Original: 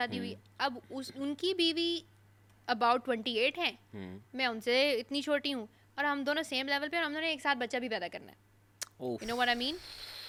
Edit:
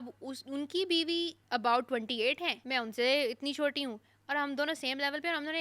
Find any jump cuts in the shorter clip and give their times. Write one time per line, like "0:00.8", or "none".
0:01.4
0:02.6